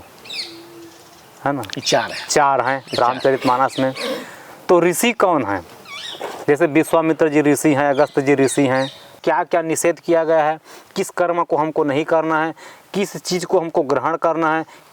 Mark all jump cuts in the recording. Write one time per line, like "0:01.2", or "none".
0:09.2